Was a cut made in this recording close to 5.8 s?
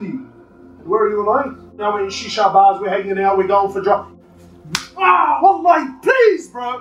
no; 2 cuts; at 1.8 s, 4.0 s

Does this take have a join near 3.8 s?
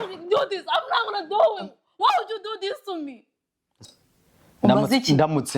yes; 1 cut; at 3.8 s

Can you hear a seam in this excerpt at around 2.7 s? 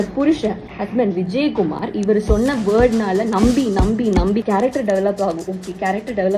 no; 1 cut; at 4.4 s

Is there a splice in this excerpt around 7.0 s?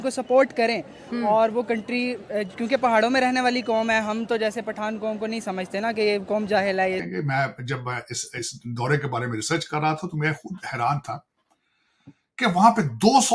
yes; 1 cut; at 7.0 s

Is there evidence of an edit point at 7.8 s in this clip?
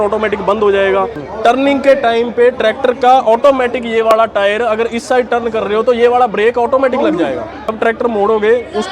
yes; 2 cuts; at 1.2 s, 7.8 s

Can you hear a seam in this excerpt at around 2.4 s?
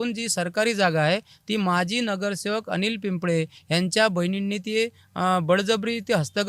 no; 0 cuts

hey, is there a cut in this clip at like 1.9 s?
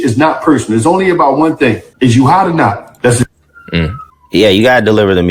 yes; 1 cut; at 1.9 s

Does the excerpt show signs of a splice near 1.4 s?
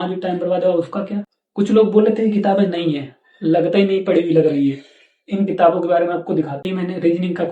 yes; 2 cuts; at 1.4 s, 6.6 s

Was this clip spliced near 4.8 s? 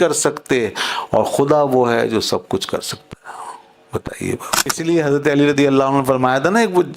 yes; 1 cut; at 4.8 s

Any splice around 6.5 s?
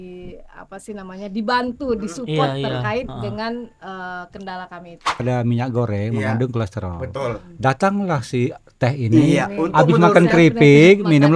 no; 1 cut; at 5.2 s

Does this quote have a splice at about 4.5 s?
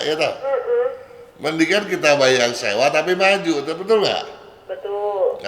no; 0 cuts

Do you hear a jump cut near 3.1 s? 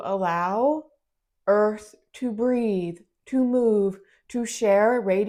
no; 0 cuts

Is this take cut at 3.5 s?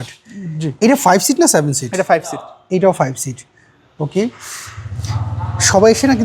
no; 0 cuts

